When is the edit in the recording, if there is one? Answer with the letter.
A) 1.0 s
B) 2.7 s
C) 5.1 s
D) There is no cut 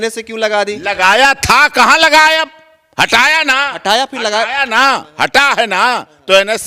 D